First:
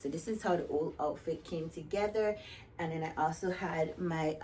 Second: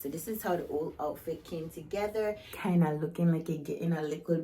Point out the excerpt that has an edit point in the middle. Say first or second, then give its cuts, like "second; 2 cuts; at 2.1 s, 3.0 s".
second; 1 cut; at 2.5 s